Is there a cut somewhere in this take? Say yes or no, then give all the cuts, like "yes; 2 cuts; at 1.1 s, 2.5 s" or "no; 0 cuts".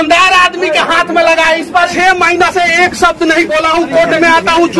yes; 1 cut; at 1.9 s